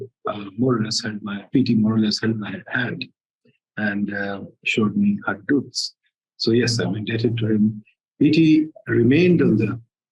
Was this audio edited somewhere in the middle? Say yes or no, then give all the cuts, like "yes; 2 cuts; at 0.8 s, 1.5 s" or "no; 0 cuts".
no; 0 cuts